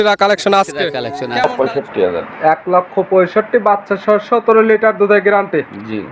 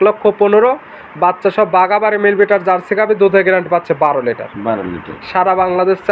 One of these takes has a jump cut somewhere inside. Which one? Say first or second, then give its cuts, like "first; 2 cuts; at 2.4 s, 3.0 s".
first; 1 cut; at 1.4 s